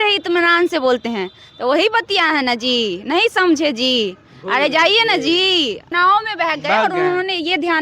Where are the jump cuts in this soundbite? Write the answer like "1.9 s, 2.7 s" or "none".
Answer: 5.9 s